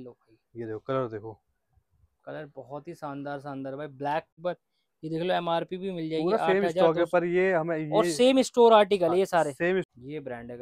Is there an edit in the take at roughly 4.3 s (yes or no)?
yes